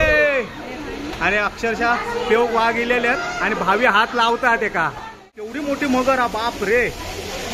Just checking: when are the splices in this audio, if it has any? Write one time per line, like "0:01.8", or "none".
0:05.5

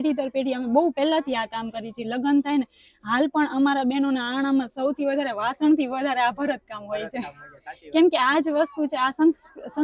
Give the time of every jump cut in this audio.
none

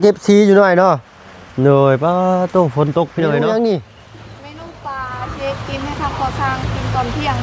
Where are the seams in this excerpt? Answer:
0:03.3

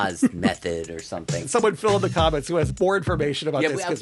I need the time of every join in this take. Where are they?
0:01.5
0:02.7

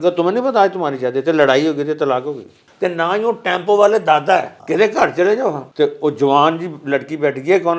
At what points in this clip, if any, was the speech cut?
0:02.6
0:04.6
0:05.6

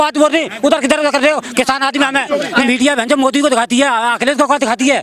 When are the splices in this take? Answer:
0:02.6

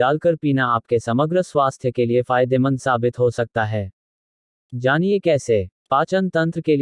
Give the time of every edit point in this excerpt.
0:05.7

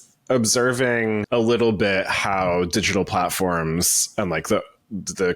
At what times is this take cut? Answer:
0:01.2

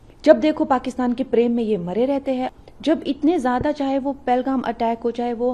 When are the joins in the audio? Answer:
0:02.5

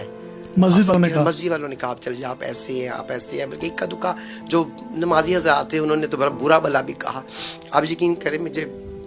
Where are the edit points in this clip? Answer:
0:00.9

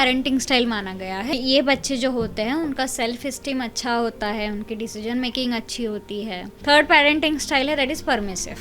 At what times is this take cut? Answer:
0:01.3
0:06.5

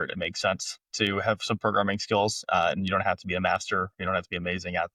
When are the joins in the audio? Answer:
none

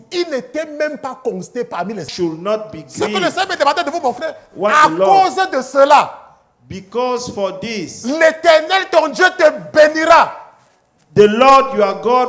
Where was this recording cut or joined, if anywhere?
0:02.0

